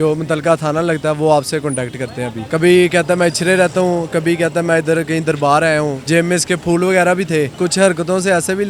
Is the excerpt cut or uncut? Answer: cut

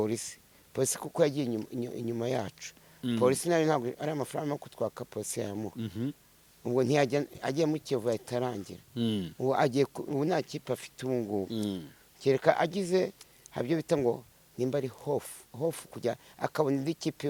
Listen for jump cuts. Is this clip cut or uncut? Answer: uncut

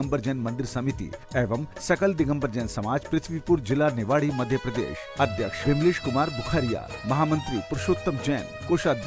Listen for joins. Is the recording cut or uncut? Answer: uncut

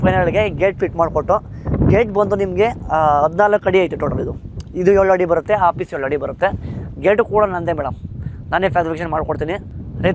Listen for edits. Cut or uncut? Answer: uncut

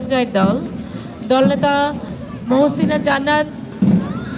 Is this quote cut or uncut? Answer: uncut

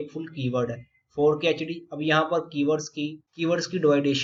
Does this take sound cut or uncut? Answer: uncut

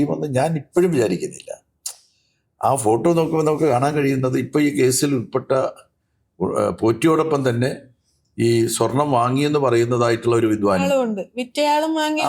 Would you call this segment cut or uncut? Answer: uncut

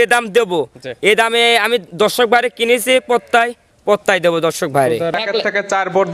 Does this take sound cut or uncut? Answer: cut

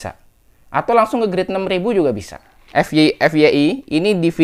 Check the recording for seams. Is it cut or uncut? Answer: cut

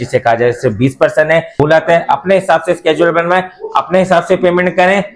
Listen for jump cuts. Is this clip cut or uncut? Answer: cut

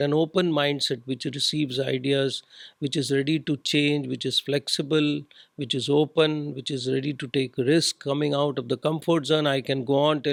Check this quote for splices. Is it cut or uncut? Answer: uncut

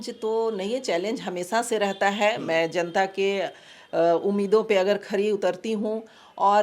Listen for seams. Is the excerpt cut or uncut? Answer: uncut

